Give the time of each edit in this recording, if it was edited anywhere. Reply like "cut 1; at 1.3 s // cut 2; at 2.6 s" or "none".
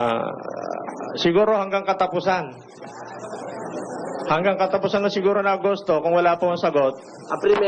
none